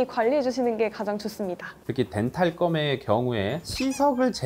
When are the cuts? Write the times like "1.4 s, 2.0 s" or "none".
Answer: 1.8 s

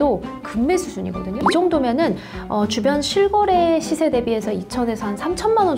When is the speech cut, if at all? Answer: 1.4 s

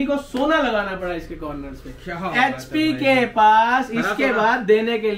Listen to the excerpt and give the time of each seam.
none

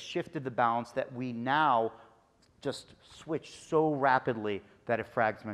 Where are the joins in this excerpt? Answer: none

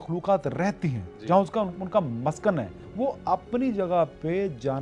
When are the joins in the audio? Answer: 2.8 s

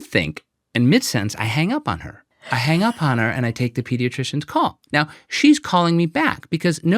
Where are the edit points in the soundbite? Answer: 4.8 s

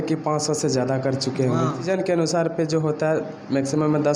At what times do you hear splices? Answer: 1.9 s

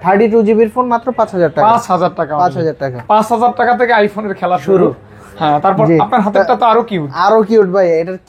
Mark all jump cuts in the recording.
none

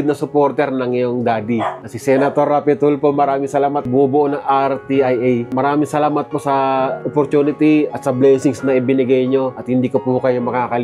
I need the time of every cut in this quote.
none

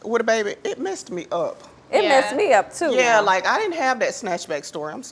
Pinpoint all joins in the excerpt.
none

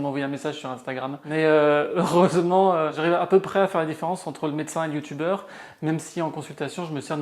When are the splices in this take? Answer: 1.2 s

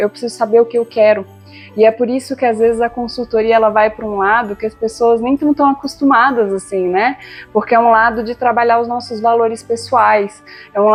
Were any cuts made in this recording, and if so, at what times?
none

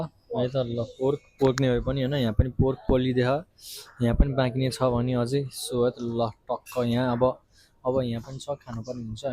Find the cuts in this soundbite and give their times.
none

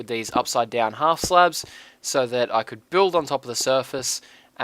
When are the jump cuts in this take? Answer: 2.0 s

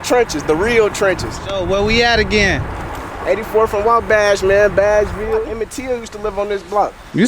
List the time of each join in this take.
1.5 s, 5.5 s

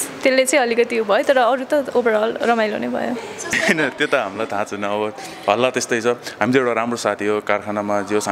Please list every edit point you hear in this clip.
3.6 s

